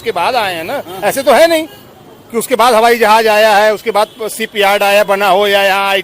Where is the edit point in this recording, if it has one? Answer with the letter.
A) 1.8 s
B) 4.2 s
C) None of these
C